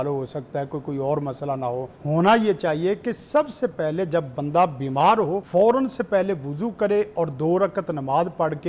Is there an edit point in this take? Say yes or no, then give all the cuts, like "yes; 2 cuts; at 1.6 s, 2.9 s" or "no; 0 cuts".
yes; 2 cuts; at 1.9 s, 5.4 s